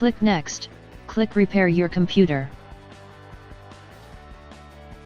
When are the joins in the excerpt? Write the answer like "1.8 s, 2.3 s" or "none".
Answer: 2.5 s